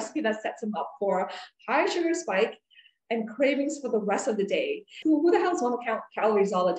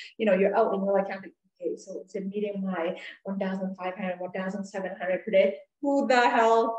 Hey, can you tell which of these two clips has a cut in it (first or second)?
first